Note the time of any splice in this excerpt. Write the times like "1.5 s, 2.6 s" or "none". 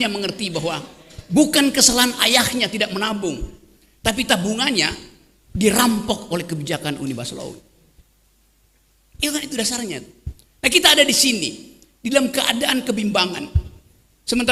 none